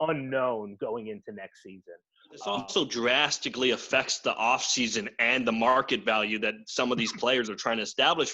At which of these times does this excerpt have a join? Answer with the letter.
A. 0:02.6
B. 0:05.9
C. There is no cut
A